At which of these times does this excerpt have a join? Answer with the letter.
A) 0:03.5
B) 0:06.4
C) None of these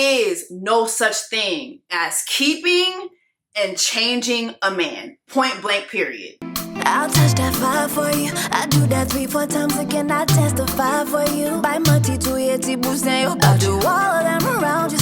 B